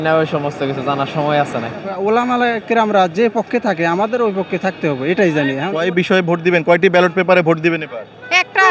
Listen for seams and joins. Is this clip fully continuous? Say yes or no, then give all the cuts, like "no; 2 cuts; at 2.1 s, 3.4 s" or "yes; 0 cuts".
no; 2 cuts; at 1.9 s, 5.8 s